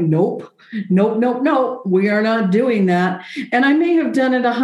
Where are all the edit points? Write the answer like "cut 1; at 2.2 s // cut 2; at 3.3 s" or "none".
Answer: none